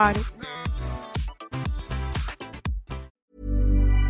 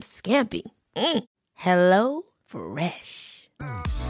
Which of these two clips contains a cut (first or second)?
first